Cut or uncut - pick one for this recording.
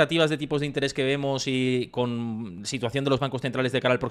uncut